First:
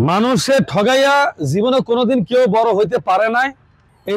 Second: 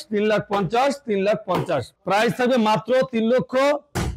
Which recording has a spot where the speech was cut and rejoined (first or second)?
second